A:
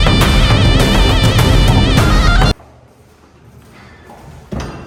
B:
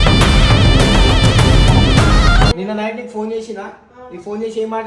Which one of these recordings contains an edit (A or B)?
B